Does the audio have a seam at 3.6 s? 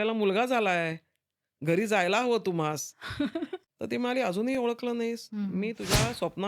yes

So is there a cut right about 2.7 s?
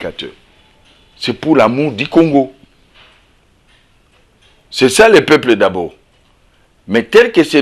no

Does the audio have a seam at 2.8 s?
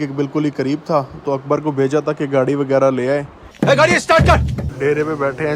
no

